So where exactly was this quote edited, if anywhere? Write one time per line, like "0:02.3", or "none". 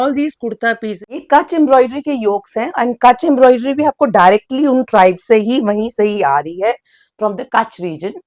0:01.1